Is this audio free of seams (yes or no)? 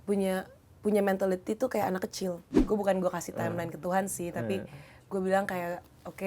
no